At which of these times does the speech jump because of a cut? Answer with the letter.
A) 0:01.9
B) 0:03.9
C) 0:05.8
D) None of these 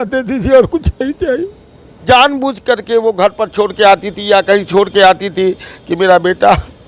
A